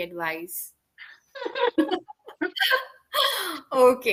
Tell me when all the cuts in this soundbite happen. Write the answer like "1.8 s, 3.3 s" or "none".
none